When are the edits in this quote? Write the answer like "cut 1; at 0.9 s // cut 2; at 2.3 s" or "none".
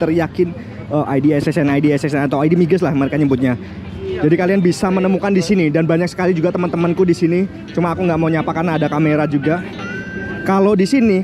none